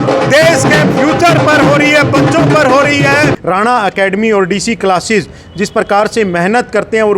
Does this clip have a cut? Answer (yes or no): yes